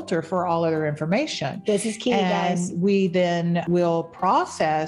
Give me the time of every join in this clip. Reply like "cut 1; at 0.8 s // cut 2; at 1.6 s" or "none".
cut 1; at 3.6 s